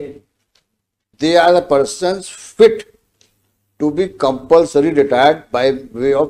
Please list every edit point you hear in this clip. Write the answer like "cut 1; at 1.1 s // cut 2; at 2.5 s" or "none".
cut 1; at 1.1 s